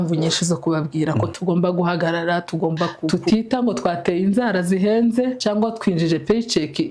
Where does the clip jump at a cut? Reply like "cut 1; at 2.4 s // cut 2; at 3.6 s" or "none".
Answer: cut 1; at 1.3 s // cut 2; at 3.2 s // cut 3; at 5.4 s